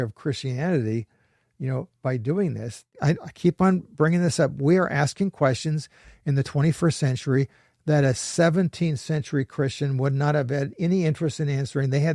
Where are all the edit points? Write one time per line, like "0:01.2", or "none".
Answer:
0:02.9